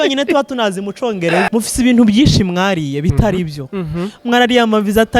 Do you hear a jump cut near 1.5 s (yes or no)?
yes